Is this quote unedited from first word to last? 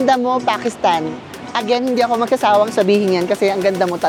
yes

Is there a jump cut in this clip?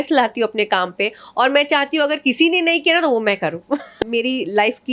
yes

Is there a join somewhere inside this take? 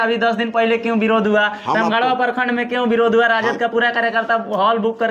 no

